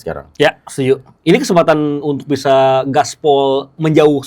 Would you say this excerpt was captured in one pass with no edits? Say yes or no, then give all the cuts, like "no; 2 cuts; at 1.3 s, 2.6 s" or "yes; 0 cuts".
no; 1 cut; at 1.1 s